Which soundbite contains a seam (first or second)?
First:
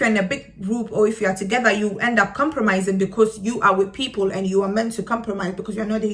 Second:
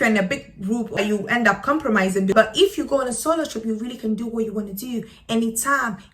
second